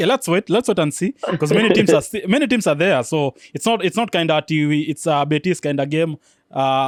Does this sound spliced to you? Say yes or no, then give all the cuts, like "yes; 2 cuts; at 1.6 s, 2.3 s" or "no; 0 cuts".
no; 0 cuts